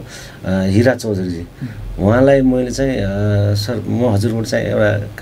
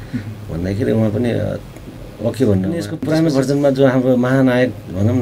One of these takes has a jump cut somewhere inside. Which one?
second; 1 cut; at 2.8 s

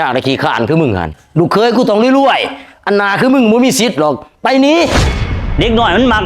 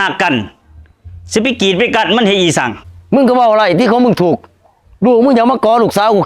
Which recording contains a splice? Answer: first; 1 cut; at 5.0 s

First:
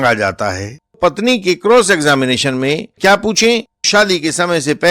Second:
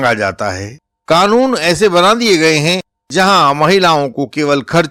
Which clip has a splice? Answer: first; 3 cuts; at 1.0 s, 2.9 s, 3.9 s

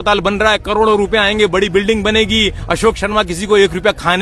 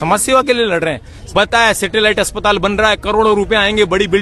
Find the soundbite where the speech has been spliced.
second; 1 cut; at 1.1 s

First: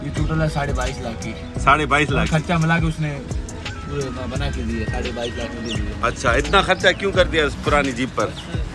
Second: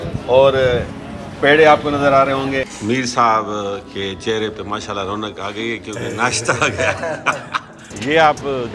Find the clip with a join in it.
second; 2 cuts; at 2.7 s, 7.8 s

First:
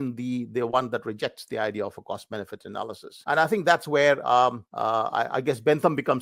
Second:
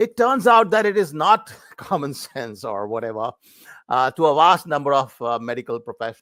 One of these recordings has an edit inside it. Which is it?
first; 2 cuts; at 3.1 s, 4.7 s

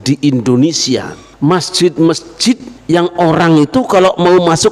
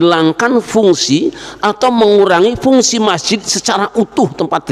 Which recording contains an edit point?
first; 2 cuts; at 1.2 s, 2.7 s

